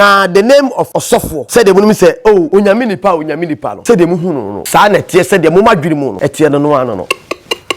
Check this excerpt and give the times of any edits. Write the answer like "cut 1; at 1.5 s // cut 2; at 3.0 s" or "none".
cut 1; at 1.0 s // cut 2; at 2.5 s // cut 3; at 3.7 s // cut 4; at 4.5 s // cut 5; at 6.1 s // cut 6; at 7.1 s